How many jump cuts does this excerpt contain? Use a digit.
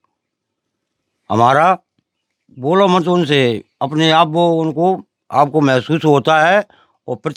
0